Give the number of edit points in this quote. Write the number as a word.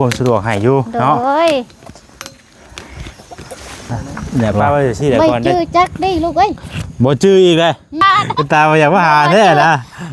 two